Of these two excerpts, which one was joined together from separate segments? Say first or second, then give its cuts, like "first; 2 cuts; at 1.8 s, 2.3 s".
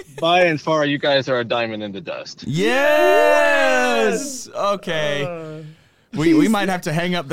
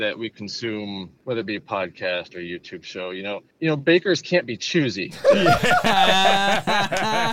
second; 1 cut; at 1.1 s